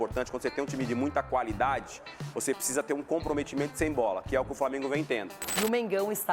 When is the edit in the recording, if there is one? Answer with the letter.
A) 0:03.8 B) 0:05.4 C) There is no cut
B